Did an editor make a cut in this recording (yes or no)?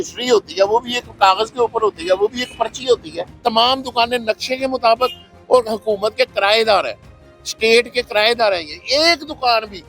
yes